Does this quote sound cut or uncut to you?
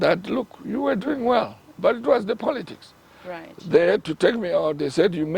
cut